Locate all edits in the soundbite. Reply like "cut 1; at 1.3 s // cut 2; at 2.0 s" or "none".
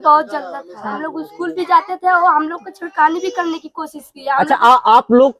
cut 1; at 0.9 s